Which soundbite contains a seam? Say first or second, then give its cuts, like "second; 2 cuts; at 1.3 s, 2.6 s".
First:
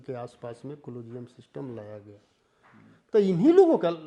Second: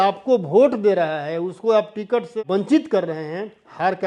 second; 1 cut; at 2.4 s